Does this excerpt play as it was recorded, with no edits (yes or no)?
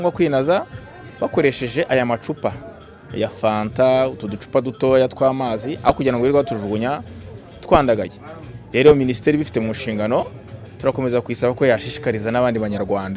yes